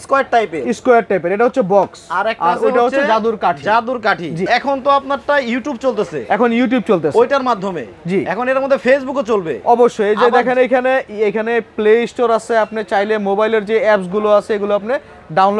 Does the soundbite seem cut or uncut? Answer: cut